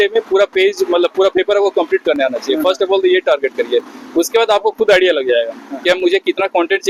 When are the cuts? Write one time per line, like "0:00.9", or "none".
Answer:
none